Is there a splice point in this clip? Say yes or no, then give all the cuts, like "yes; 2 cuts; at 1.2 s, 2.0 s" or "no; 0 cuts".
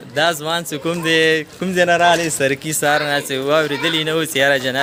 no; 0 cuts